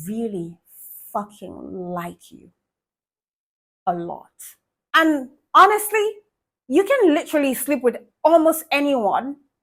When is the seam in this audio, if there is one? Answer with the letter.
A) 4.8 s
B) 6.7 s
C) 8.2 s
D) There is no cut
D